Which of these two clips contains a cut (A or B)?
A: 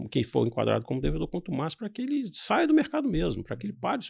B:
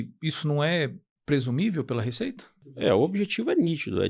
B